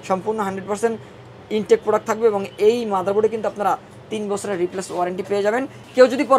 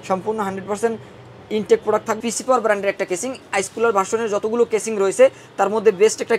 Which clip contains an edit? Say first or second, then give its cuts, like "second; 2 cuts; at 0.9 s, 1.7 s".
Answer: second; 1 cut; at 2.2 s